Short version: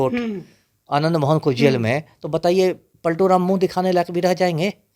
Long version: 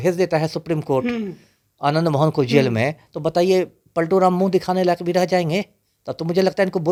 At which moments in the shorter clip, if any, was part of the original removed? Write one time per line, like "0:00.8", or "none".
none